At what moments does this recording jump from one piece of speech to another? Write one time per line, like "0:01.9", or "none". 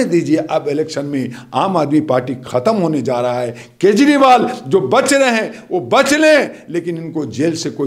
none

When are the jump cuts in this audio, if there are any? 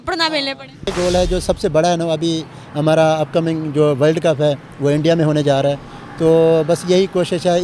0:00.9

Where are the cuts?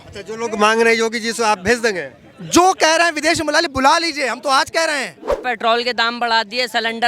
0:05.4

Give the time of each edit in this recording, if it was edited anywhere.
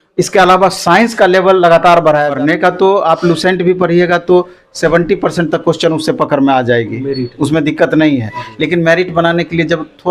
0:02.3

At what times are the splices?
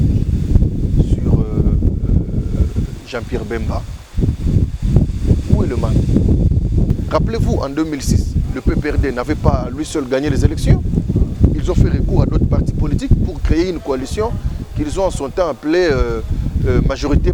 0:06.9

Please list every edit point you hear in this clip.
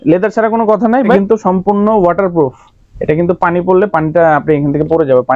0:01.1

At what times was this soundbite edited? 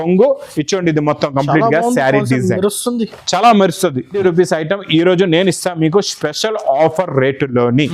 0:04.2

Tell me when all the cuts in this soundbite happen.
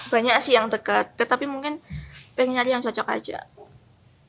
0:01.2

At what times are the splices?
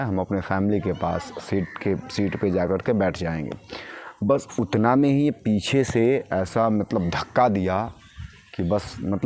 none

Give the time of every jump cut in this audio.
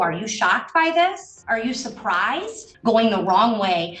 0:01.3
0:02.7

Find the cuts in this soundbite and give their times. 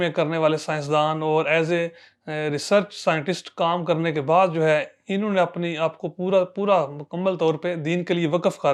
none

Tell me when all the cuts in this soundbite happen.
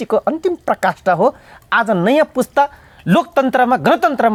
none

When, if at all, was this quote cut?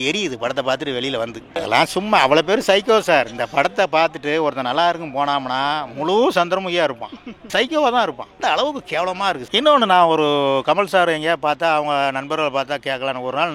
0:01.5
0:09.4

